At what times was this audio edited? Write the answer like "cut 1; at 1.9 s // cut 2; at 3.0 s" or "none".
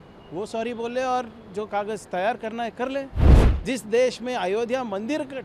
cut 1; at 3.2 s